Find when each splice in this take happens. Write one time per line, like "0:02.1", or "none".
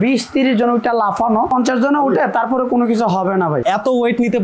0:01.5
0:03.6